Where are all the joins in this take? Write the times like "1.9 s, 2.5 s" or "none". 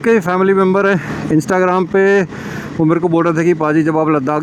none